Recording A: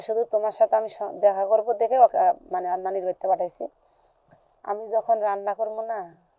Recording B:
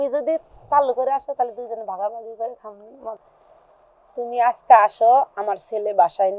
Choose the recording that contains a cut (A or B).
B